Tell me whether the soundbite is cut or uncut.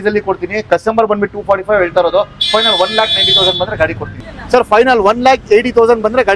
cut